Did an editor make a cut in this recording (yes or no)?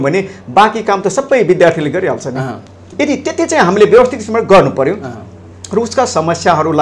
no